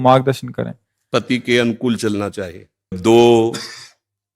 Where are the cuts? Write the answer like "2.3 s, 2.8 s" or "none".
3.0 s